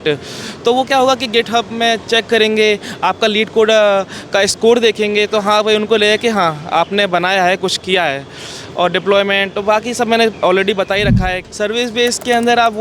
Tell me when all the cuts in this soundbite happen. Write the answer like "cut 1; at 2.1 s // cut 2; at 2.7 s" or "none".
cut 1; at 11.4 s